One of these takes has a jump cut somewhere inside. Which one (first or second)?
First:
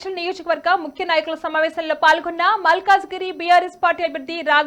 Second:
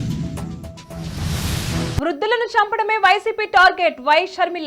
second